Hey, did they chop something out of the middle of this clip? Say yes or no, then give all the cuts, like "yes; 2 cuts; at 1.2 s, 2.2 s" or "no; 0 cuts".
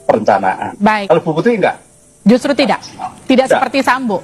yes; 1 cut; at 1.0 s